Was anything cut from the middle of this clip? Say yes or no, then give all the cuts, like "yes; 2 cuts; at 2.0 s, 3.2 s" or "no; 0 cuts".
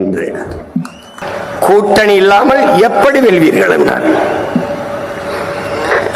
yes; 1 cut; at 1.0 s